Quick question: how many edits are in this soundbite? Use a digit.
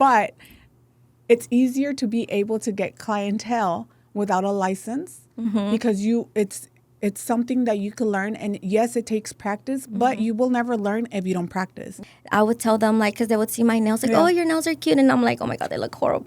1